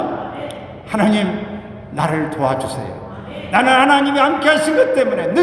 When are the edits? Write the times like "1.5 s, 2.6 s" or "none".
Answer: none